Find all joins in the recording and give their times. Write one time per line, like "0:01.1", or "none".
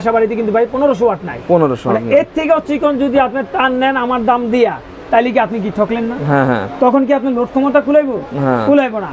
none